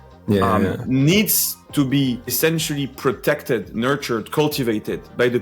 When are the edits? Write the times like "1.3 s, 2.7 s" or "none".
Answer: 2.3 s